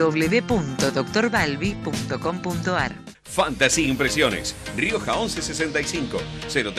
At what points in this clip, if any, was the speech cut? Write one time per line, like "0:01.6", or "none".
0:03.1